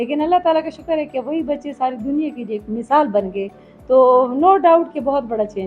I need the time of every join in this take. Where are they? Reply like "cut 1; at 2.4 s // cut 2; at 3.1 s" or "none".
none